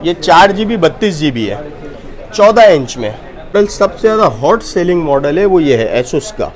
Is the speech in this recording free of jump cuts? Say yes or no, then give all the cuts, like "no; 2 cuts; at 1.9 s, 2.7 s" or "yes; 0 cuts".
no; 1 cut; at 3.5 s